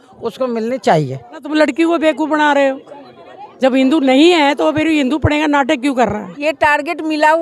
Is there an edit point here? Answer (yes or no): yes